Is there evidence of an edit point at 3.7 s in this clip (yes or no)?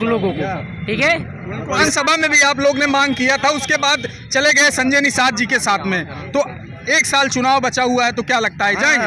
no